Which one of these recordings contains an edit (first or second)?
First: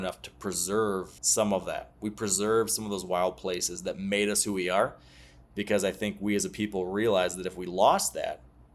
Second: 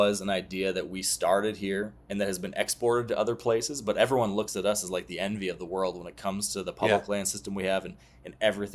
first